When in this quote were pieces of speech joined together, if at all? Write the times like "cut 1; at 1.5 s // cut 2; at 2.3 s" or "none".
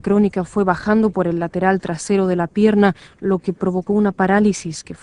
cut 1; at 3.4 s